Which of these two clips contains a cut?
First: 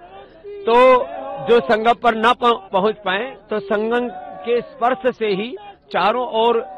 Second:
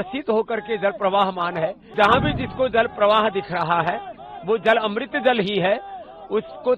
second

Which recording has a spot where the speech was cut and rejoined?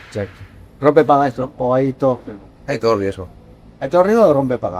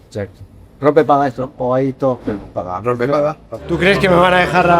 second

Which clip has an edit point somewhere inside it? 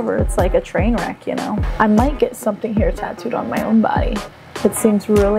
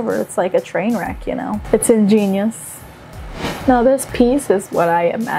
first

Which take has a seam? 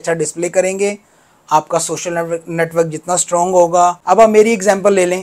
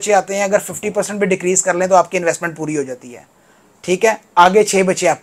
first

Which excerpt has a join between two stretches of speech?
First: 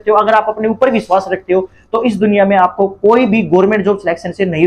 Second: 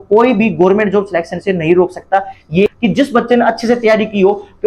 second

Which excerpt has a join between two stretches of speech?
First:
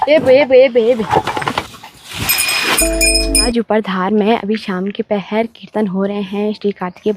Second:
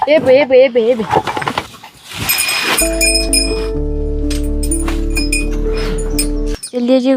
first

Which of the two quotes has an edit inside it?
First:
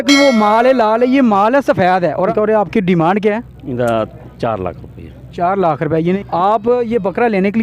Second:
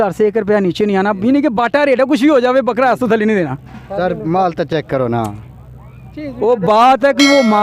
first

